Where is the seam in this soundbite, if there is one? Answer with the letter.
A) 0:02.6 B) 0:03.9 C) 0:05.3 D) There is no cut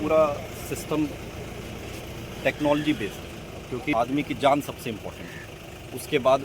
B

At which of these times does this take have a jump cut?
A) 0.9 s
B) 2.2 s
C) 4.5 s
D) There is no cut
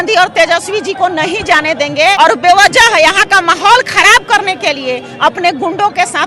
B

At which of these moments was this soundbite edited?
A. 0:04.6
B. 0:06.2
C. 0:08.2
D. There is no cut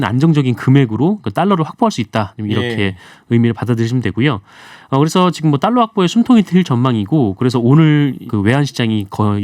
C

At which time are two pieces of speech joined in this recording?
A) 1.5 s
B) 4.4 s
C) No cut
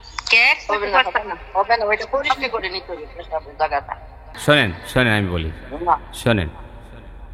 B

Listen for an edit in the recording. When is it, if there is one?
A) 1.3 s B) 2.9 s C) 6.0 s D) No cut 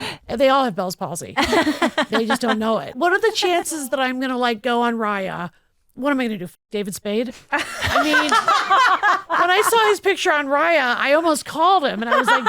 B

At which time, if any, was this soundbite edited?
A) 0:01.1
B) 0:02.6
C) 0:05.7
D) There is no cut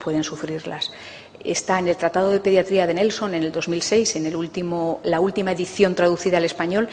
C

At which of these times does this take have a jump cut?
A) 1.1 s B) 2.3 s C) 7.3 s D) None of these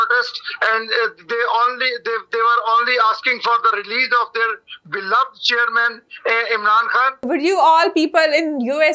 C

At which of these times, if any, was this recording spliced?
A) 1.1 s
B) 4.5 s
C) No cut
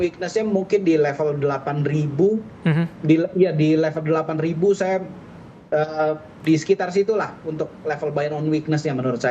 C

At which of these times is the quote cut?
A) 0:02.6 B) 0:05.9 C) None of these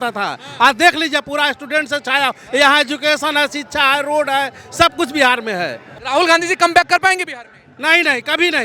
B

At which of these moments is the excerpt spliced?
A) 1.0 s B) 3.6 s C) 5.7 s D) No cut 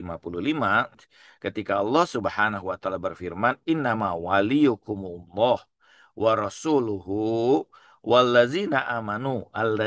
A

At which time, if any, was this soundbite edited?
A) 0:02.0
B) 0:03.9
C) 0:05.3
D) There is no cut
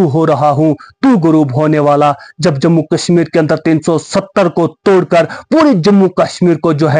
D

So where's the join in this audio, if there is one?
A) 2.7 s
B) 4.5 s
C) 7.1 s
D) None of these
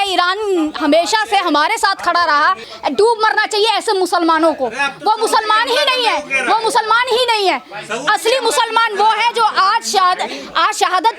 A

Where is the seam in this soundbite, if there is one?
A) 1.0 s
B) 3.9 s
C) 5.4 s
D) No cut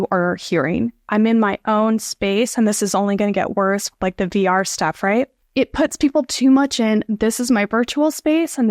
A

